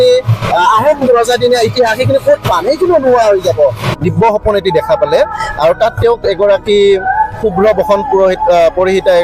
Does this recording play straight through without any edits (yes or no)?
no